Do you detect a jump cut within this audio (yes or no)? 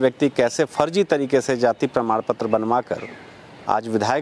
no